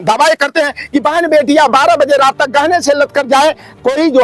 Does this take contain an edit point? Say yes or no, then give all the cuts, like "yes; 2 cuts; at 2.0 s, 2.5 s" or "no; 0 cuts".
no; 0 cuts